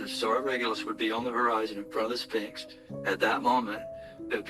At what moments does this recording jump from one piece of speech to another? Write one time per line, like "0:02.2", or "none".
none